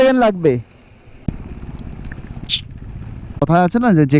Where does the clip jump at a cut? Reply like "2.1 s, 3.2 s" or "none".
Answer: 1.2 s, 3.4 s